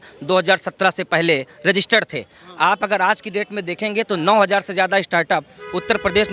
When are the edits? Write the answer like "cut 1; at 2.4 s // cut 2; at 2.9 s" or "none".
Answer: none